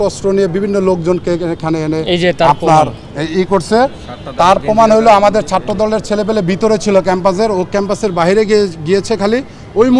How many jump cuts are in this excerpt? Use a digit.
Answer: 0